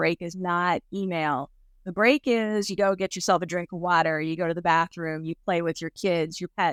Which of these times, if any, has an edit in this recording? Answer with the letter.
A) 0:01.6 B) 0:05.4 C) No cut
C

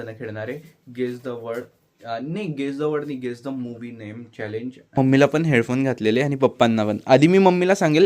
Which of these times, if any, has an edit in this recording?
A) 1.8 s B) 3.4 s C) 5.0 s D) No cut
C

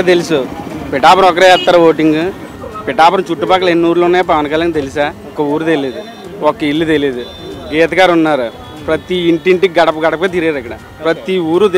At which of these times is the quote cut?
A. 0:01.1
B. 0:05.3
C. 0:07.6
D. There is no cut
B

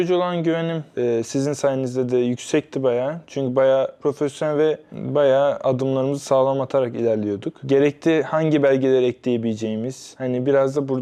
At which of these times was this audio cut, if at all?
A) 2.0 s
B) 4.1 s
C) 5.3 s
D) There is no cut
D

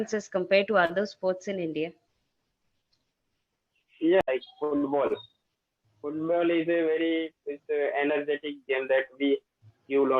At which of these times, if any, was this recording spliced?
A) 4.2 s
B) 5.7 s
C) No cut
A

